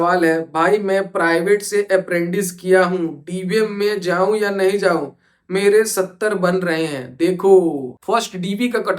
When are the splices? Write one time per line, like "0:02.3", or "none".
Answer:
0:07.9